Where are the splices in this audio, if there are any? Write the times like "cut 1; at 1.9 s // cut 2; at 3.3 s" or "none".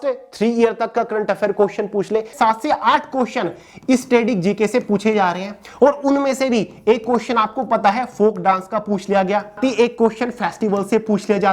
cut 1; at 2.3 s // cut 2; at 9.6 s